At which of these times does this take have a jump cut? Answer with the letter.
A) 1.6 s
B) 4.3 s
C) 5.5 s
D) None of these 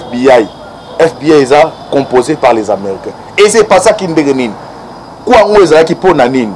D